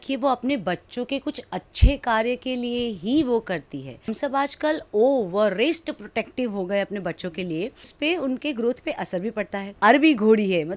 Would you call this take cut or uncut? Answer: cut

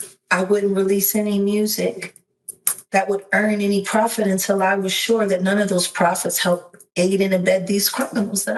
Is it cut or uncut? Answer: uncut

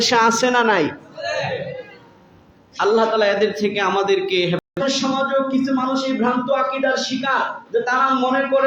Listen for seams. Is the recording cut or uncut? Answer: cut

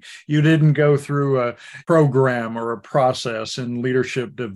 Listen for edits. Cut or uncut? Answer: cut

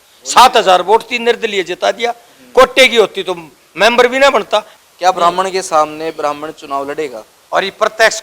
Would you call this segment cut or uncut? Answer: cut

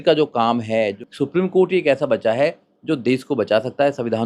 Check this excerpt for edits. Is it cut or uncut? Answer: cut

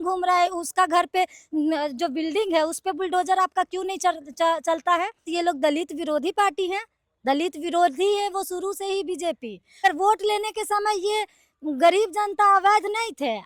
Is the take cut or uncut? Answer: cut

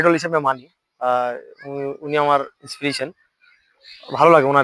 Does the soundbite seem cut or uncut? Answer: uncut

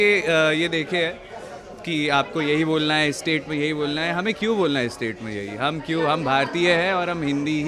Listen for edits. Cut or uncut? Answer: uncut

